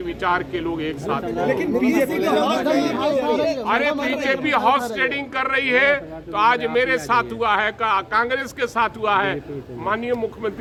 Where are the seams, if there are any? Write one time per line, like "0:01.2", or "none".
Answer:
none

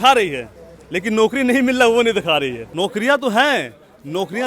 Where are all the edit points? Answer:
0:02.6

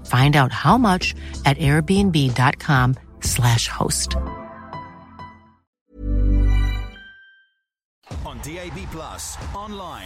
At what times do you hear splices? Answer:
0:07.9

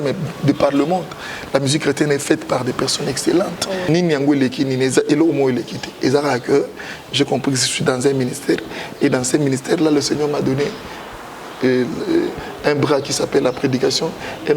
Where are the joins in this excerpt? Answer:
0:03.9

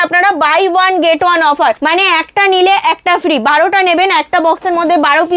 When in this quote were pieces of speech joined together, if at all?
0:01.8

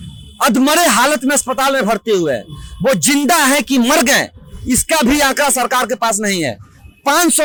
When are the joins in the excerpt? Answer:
none

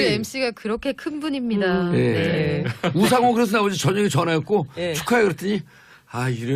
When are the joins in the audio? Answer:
none

